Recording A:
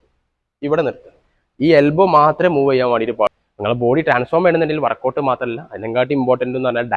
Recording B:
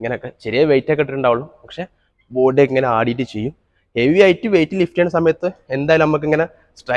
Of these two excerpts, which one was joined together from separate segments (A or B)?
A